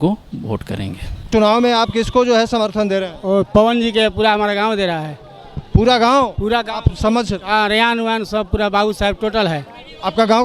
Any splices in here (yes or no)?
yes